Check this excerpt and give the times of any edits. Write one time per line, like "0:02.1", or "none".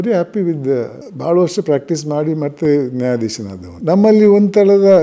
0:01.0